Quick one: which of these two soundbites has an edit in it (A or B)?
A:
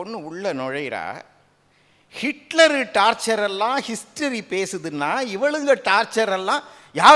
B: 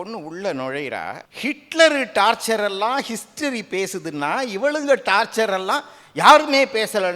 B